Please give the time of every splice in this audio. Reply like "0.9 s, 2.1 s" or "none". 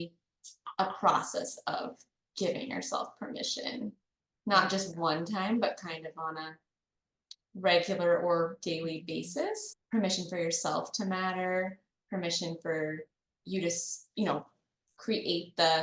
9.7 s